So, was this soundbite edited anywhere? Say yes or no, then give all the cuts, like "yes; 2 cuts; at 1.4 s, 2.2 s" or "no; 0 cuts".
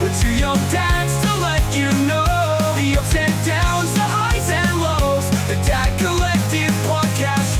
no; 0 cuts